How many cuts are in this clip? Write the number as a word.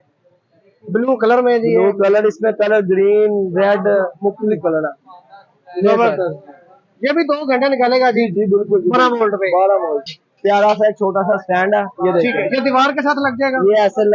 one